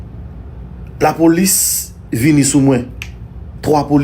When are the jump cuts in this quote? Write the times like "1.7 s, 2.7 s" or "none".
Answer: none